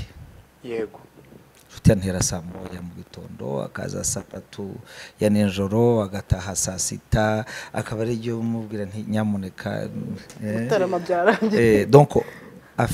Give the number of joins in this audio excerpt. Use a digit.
0